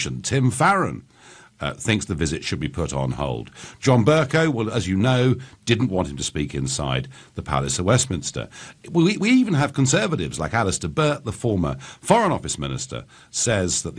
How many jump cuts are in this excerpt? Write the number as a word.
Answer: one